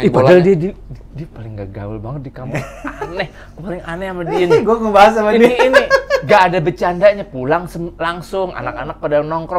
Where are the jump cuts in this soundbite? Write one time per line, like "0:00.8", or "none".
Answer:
none